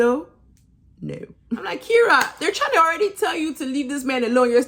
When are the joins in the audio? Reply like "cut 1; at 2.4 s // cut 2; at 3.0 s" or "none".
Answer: cut 1; at 1.6 s